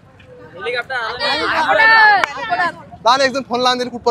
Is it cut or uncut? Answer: uncut